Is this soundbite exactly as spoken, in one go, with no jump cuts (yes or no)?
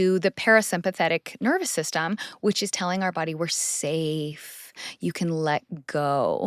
yes